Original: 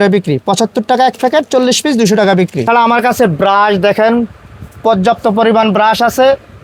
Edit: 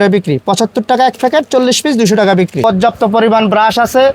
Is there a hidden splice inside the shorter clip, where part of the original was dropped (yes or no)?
yes